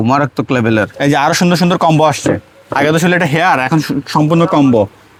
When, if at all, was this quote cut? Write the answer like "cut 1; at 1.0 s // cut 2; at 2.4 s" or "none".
none

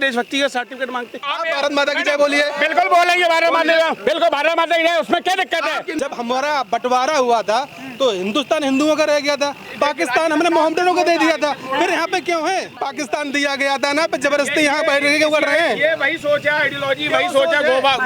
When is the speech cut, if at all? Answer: cut 1; at 1.3 s // cut 2; at 5.9 s // cut 3; at 12.8 s

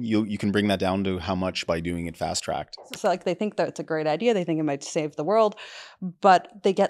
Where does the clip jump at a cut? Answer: cut 1; at 2.7 s

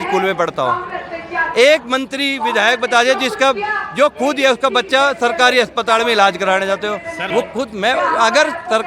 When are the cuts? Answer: cut 1; at 7.2 s

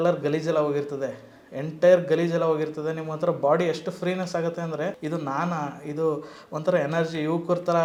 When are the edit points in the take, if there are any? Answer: none

